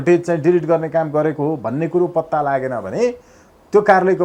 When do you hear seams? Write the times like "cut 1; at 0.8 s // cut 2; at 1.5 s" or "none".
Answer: none